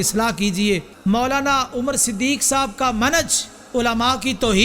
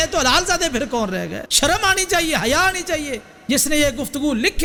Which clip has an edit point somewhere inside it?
first; 1 cut; at 0.9 s

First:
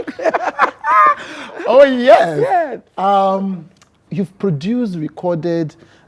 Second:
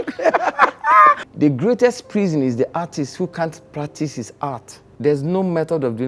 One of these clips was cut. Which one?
second; 2 cuts; at 1.3 s, 5.0 s

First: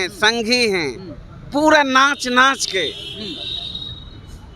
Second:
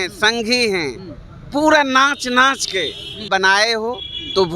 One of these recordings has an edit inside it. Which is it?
second; 1 cut; at 3.3 s

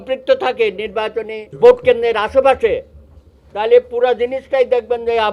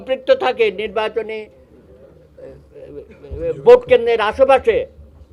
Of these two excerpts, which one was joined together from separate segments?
first; 1 cut; at 1.5 s

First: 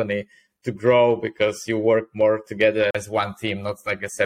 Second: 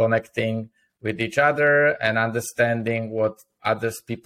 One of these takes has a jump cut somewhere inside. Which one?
first; 1 cut; at 2.9 s

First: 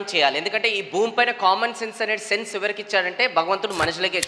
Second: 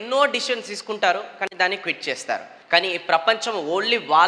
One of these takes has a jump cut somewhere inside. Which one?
second; 1 cut; at 2.5 s

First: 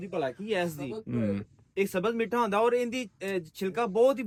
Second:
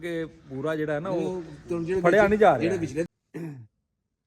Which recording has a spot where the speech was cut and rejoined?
second; 1 cut; at 3.1 s

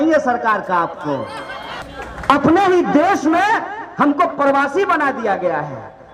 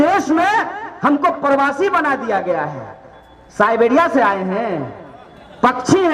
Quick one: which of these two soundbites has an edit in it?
first; 1 cut; at 1.7 s

